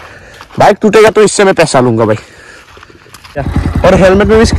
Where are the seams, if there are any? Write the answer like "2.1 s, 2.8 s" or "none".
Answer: 3.6 s